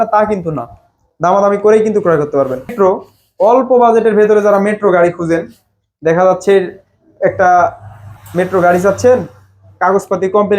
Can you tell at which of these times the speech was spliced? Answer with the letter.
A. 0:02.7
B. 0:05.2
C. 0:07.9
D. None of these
A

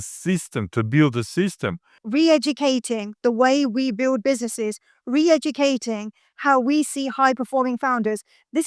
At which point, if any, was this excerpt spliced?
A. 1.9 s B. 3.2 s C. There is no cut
A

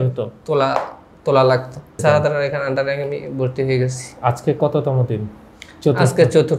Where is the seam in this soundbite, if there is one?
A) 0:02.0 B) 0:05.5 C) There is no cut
A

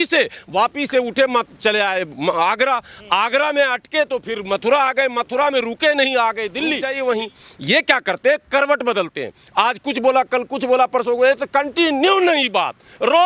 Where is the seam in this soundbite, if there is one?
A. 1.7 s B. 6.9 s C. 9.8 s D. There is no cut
B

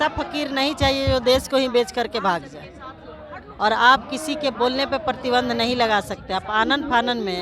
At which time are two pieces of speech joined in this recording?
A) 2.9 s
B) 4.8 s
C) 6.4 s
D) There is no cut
D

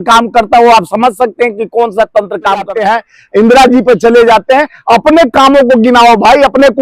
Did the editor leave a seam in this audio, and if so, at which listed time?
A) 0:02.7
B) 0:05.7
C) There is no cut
A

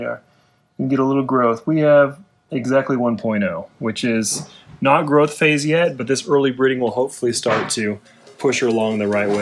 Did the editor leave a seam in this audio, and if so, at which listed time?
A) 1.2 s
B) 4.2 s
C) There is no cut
C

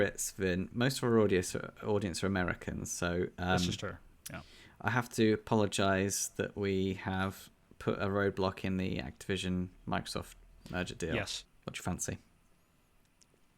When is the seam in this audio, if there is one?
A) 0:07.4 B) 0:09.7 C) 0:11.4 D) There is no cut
C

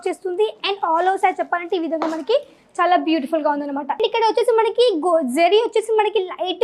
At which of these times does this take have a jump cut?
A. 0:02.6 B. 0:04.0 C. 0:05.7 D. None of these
B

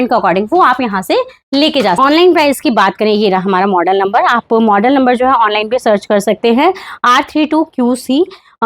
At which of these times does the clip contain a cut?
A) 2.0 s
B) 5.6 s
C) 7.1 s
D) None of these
A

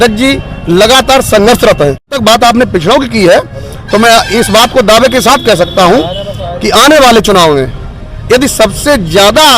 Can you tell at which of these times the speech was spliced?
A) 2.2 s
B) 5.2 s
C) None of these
A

